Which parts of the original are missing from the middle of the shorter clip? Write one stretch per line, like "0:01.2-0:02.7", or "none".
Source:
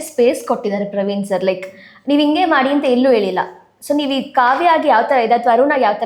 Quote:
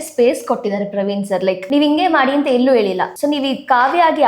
0:01.6-0:02.0
0:03.5-0:03.8

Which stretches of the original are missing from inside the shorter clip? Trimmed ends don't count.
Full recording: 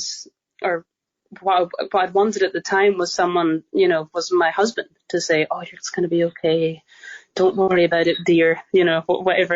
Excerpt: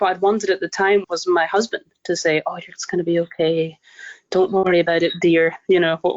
0:03.0-0:04.1

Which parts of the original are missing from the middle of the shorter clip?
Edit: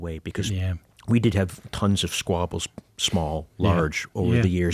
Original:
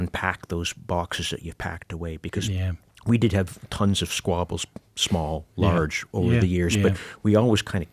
none

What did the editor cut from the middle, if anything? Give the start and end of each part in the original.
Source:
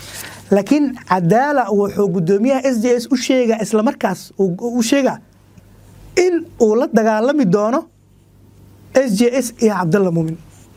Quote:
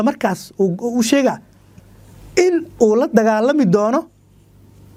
none

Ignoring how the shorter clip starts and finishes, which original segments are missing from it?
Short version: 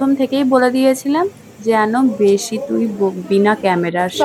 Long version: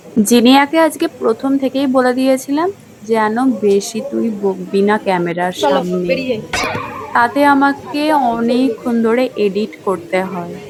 none

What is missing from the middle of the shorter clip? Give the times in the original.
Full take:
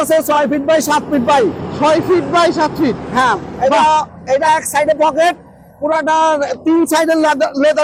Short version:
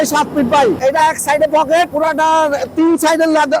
0:01.5-0:04.2
0:05.4-0:05.8

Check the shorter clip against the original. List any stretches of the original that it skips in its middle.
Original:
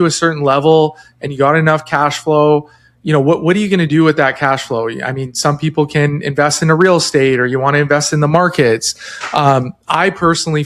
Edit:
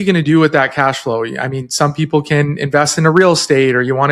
none

